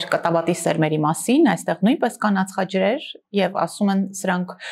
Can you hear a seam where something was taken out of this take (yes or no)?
no